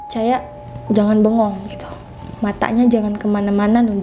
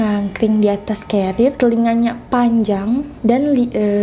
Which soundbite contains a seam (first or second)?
second